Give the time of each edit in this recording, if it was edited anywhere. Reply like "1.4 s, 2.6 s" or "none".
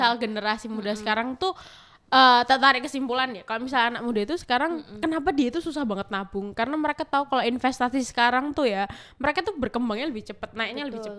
none